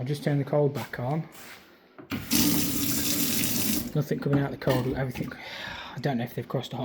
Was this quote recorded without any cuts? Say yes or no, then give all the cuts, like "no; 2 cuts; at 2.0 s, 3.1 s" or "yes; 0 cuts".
yes; 0 cuts